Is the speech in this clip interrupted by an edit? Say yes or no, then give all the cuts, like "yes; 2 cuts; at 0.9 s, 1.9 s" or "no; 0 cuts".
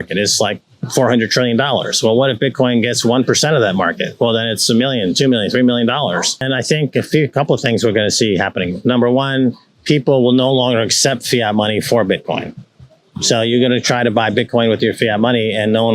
yes; 1 cut; at 6.3 s